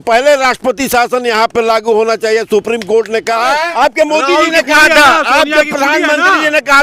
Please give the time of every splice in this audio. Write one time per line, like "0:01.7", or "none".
0:03.6